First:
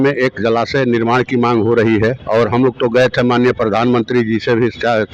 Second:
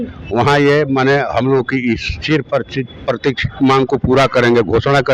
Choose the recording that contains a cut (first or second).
first